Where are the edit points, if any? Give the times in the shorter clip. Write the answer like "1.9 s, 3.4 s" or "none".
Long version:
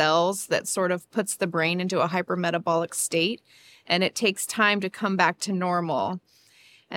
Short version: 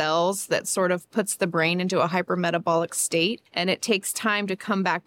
3.5 s